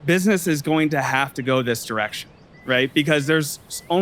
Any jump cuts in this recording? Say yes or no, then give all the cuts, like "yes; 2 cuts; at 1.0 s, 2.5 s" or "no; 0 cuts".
no; 0 cuts